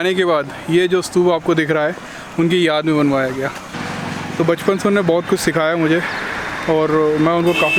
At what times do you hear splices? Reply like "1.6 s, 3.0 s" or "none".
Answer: none